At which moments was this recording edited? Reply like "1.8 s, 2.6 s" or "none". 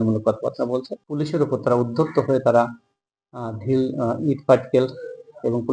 1.0 s